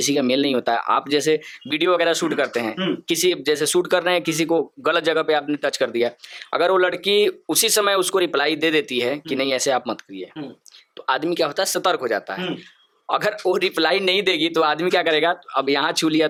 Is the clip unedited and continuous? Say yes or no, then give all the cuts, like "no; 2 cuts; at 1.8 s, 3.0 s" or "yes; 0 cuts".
yes; 0 cuts